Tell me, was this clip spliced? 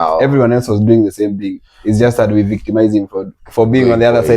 yes; 1 cut; at 3.4 s

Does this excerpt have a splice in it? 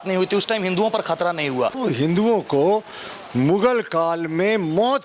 yes; 1 cut; at 1.8 s

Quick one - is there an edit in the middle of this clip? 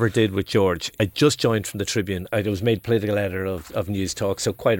yes; 2 cuts; at 1.0 s, 2.3 s

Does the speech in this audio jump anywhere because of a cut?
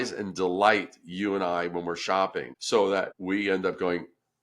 yes; 2 cuts; at 2.5 s, 3.2 s

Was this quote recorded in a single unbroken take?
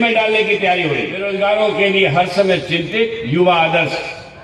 no; 1 cut; at 1.3 s

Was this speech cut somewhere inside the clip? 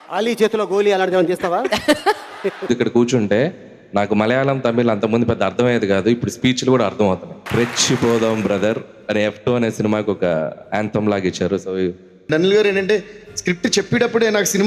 yes; 3 cuts; at 2.7 s, 7.3 s, 12.1 s

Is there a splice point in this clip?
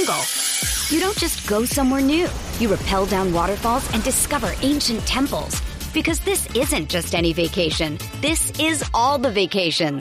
no; 0 cuts

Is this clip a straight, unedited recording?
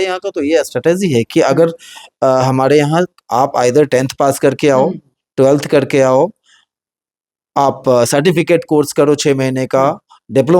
yes; 0 cuts

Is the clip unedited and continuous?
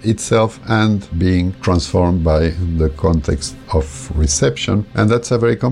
no; 2 cuts; at 1.1 s, 4.0 s

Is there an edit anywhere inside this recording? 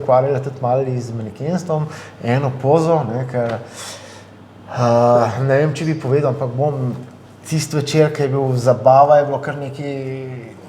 no; 0 cuts

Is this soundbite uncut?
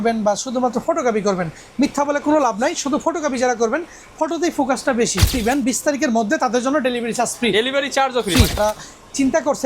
no; 2 cuts; at 5.4 s, 8.6 s

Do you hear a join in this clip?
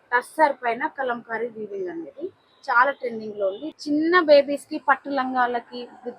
yes; 1 cut; at 3.7 s

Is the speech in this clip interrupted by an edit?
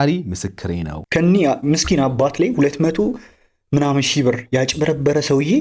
yes; 1 cut; at 0.9 s

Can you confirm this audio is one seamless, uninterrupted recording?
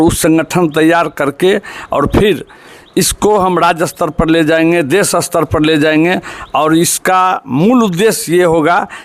yes; 0 cuts

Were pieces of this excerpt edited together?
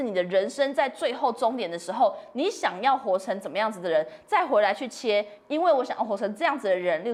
no; 0 cuts

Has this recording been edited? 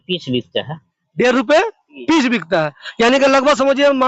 no; 0 cuts

